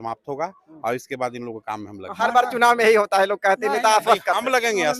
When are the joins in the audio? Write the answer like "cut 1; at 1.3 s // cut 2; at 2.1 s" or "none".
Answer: none

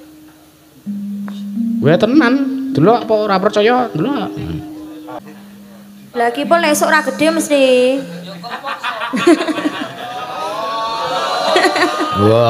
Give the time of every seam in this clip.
cut 1; at 5.2 s

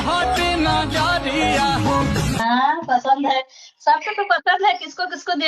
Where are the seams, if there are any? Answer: cut 1; at 2.4 s

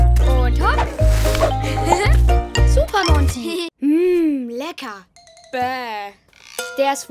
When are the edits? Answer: cut 1; at 3.7 s

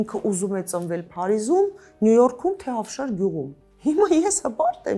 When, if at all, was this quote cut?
cut 1; at 3.6 s

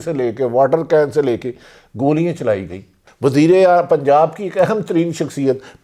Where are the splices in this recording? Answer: cut 1; at 3.0 s

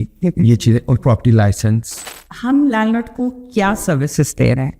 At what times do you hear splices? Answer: cut 1; at 1.9 s

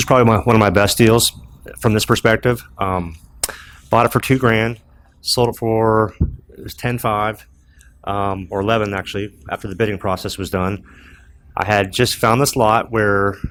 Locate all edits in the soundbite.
none

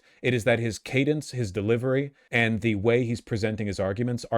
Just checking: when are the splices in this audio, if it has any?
cut 1; at 2.2 s

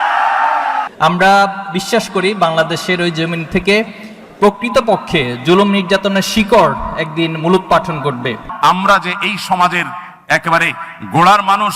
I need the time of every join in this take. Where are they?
cut 1; at 0.9 s // cut 2; at 8.4 s

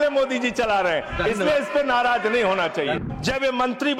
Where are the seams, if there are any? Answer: cut 1; at 3.0 s

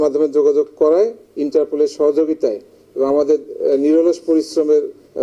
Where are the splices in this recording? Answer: none

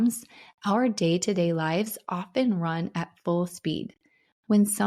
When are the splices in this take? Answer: none

